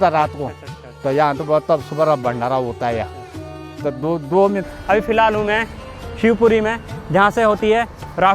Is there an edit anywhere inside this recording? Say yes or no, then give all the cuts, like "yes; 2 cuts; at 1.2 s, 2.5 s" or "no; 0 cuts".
yes; 1 cut; at 4.6 s